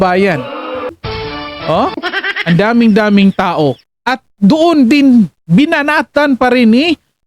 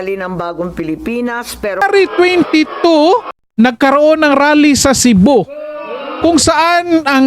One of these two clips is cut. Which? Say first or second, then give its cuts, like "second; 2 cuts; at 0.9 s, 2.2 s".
second; 1 cut; at 1.8 s